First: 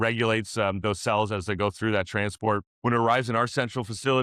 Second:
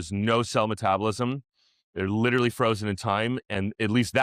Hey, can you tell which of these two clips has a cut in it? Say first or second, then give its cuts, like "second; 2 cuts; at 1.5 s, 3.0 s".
first; 1 cut; at 2.7 s